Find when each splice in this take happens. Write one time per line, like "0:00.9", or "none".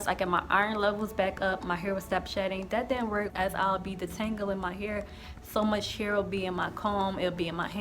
0:03.3